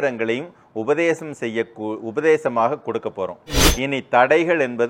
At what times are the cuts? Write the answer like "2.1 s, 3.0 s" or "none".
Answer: 3.6 s